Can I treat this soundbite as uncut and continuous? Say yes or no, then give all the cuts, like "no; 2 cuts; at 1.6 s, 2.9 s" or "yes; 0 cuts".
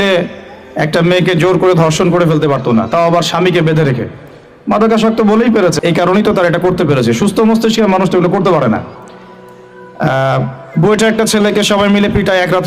no; 1 cut; at 5.8 s